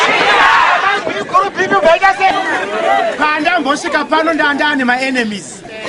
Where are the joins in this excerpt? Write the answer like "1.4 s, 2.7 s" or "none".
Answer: 2.3 s